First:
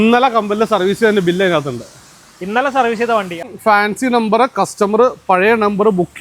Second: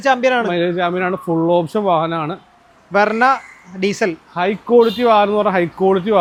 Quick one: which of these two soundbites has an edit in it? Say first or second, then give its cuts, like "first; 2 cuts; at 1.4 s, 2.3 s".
first; 1 cut; at 3.5 s